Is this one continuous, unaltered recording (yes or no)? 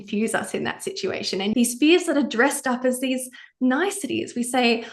no